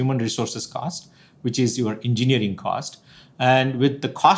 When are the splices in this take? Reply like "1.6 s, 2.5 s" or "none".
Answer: none